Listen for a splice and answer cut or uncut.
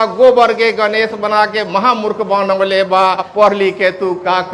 cut